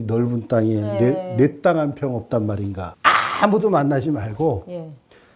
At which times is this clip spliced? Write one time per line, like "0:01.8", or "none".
0:02.8

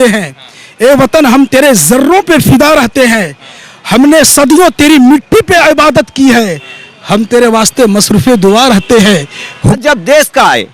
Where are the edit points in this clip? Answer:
0:09.8

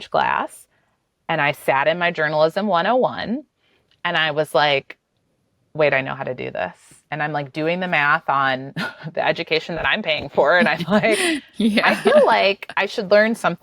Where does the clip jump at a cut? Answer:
0:06.9
0:11.9

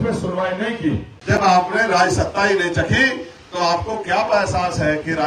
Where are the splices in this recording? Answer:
0:01.1

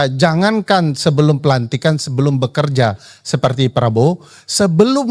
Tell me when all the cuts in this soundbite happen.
none

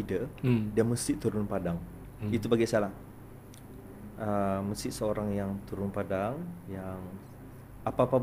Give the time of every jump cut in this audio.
none

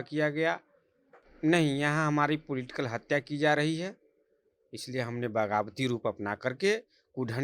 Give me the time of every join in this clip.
0:01.3

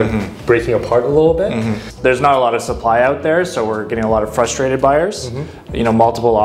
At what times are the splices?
0:01.8

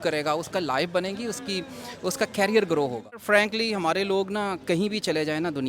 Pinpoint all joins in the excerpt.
0:03.2

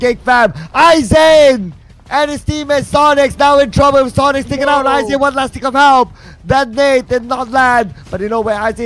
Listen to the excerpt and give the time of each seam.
none

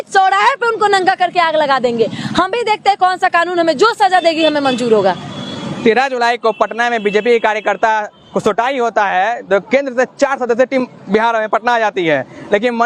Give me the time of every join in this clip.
none

